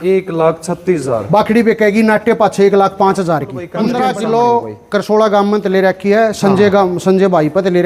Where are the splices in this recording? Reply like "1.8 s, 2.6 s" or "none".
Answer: 3.7 s